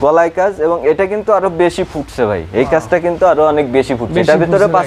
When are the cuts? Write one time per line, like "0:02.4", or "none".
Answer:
none